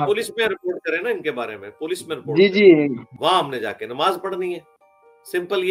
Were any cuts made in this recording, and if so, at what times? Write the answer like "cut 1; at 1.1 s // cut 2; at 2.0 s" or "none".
cut 1; at 3.1 s